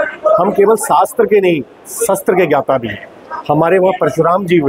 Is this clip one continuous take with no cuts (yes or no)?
yes